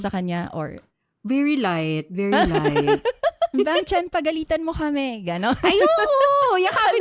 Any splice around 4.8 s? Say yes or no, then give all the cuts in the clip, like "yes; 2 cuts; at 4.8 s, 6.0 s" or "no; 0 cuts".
no; 1 cut; at 3.5 s